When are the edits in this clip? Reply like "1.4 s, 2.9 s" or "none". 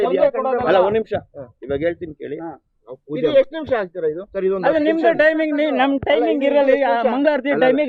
none